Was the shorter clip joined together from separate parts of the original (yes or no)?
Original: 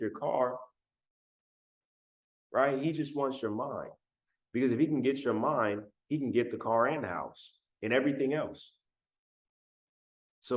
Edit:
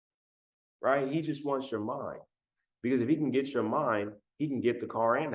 no